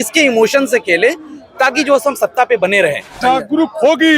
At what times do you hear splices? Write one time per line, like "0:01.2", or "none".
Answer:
0:03.2